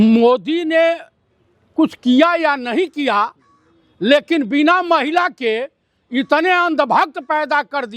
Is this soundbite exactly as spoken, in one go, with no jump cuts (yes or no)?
yes